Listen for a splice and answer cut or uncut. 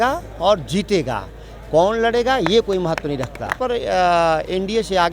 cut